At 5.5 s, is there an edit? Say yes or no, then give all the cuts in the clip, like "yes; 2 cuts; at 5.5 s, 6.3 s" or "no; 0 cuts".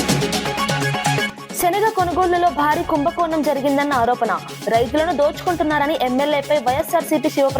no; 1 cut; at 1.4 s